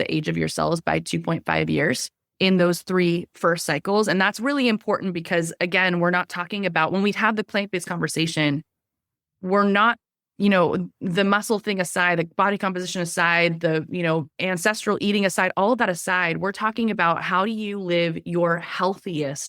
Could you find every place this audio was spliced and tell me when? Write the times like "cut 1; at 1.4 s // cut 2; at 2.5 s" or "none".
cut 1; at 2.4 s